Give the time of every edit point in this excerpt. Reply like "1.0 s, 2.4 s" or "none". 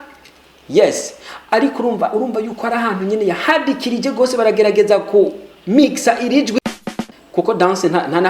6.6 s